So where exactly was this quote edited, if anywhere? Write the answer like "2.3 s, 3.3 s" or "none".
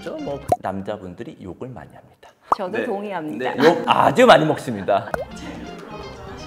5.1 s